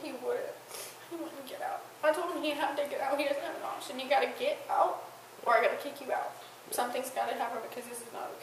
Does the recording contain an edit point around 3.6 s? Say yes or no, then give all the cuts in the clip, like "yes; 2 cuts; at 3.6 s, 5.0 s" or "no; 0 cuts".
no; 0 cuts